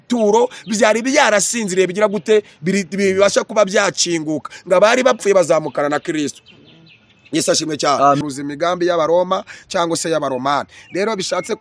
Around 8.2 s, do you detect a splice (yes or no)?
yes